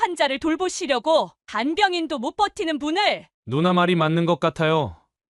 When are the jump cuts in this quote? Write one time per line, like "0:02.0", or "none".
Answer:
0:03.3